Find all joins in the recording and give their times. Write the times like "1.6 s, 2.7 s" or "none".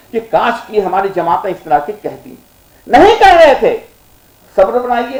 none